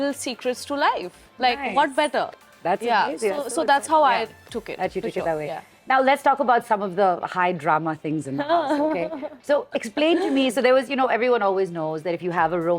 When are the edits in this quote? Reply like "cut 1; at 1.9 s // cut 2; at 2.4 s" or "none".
none